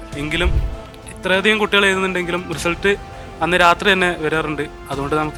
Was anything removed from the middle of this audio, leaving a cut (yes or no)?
no